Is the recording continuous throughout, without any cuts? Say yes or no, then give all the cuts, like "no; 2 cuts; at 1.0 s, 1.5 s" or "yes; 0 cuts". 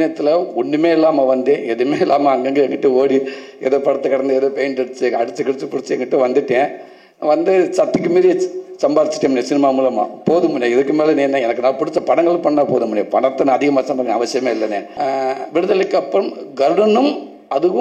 no; 1 cut; at 14.9 s